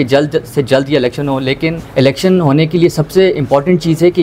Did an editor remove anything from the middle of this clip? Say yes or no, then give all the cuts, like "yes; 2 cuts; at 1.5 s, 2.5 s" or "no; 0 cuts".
yes; 1 cut; at 1.8 s